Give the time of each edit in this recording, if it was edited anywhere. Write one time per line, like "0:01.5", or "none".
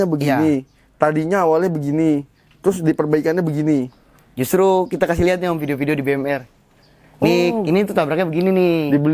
none